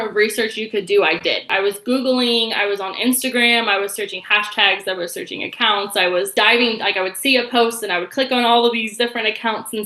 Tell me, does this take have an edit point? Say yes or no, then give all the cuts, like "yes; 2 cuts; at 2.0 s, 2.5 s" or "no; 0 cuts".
yes; 2 cuts; at 1.5 s, 6.3 s